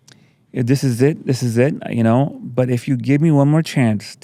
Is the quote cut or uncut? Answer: uncut